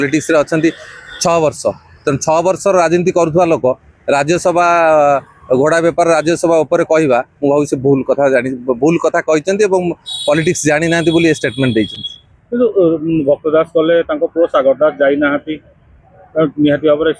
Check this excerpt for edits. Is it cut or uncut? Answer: uncut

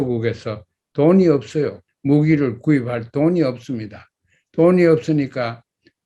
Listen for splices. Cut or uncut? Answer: cut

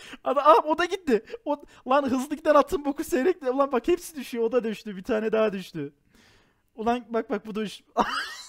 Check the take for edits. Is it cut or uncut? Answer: uncut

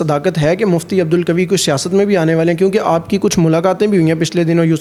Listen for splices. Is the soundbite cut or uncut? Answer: uncut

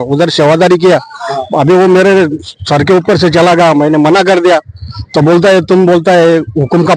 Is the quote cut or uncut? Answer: uncut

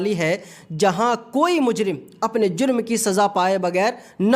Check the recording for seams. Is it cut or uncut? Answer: uncut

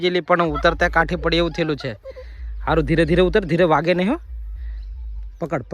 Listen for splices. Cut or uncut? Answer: uncut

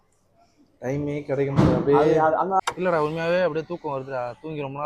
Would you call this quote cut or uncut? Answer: cut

